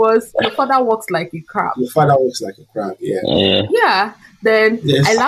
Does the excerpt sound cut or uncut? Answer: uncut